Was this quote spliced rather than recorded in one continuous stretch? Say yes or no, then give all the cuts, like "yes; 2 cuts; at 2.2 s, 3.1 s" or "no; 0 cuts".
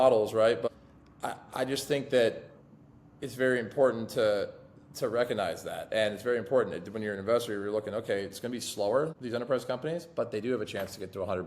yes; 2 cuts; at 0.7 s, 9.2 s